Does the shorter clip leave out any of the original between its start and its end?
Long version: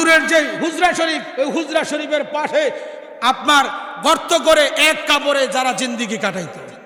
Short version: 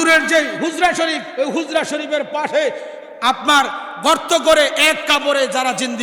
no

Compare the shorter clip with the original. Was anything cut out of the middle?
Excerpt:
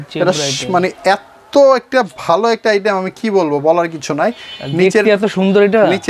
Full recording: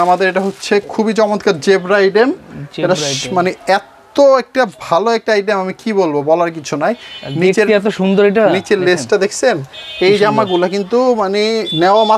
no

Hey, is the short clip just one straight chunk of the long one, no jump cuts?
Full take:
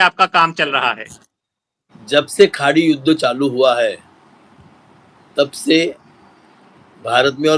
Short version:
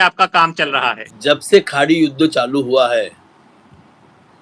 no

